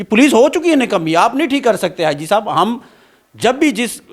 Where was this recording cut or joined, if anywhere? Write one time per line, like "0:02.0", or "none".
none